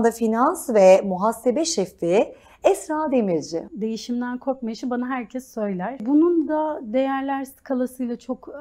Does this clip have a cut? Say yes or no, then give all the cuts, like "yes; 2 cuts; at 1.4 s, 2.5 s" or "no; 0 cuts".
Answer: yes; 2 cuts; at 3.7 s, 6.0 s